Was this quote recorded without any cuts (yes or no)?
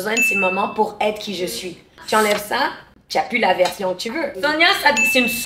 no